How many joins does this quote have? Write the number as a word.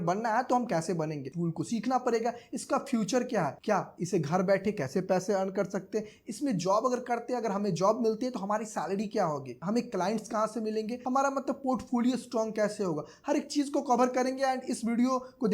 one